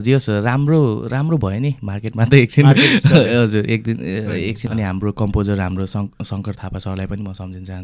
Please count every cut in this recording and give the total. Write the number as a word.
one